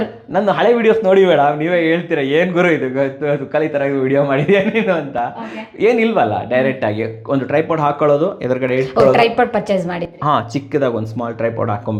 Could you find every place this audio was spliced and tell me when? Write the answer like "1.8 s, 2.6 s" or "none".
none